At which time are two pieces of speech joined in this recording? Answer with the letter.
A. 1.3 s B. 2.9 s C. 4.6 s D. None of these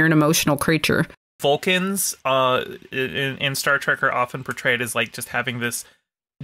A